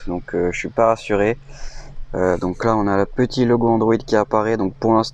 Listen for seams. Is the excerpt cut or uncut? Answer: uncut